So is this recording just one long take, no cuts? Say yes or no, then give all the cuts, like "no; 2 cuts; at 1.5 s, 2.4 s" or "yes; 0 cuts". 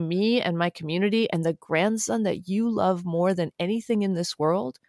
yes; 0 cuts